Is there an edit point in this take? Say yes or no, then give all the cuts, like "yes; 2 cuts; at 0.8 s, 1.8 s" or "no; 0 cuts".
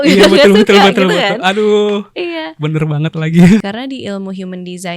yes; 1 cut; at 3.6 s